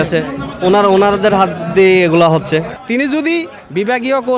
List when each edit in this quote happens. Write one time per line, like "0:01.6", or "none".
0:02.8